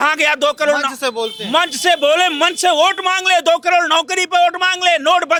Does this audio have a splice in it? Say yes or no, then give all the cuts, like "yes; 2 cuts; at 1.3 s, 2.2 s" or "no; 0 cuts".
no; 0 cuts